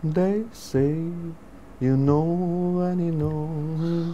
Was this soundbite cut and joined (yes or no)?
no